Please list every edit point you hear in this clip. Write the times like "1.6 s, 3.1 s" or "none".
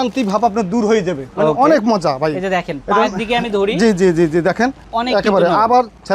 none